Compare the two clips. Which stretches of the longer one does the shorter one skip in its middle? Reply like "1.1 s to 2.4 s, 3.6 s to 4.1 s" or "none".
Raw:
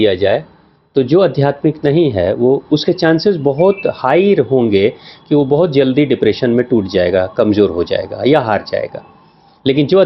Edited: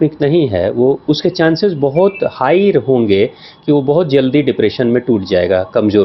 none